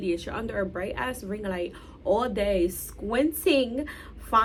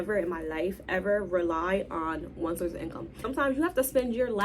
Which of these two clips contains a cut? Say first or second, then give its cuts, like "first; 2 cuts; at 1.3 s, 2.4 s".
second; 1 cut; at 3.2 s